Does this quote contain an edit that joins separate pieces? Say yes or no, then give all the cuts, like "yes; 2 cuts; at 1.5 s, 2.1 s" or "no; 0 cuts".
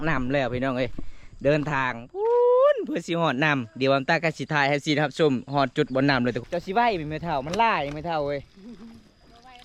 yes; 1 cut; at 6.4 s